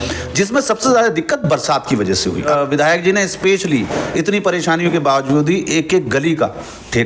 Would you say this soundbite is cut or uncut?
cut